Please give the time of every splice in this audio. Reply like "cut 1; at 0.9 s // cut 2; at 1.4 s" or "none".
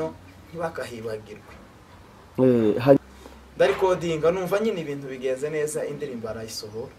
cut 1; at 3.0 s